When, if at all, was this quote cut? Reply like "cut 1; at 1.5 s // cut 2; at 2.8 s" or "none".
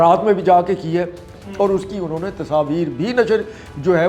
cut 1; at 1.2 s